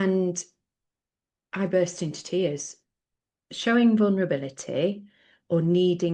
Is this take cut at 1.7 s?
no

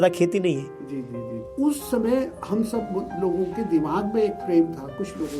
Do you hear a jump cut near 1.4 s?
yes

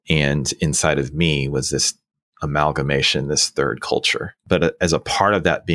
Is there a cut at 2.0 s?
no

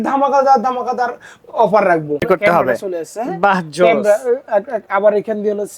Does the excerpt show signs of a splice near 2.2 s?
yes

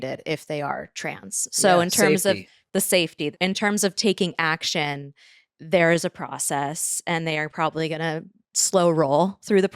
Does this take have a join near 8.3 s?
no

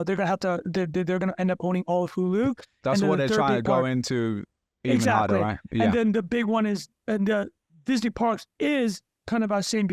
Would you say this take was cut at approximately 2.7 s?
no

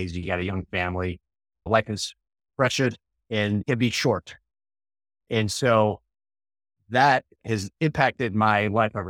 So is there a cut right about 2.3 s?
no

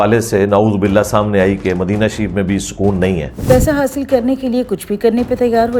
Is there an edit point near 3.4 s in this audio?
yes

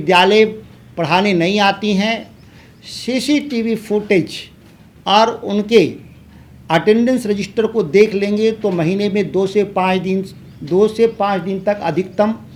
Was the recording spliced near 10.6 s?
no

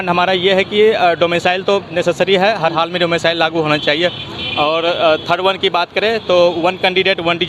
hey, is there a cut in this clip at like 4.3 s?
no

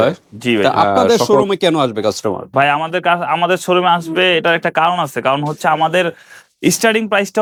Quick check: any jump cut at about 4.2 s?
no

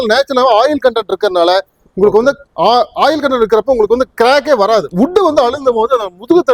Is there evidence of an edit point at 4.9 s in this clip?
yes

